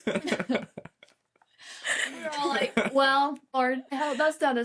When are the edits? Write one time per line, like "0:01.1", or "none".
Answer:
0:03.5